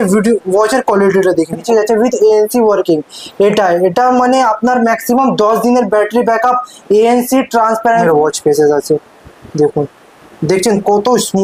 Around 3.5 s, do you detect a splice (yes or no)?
no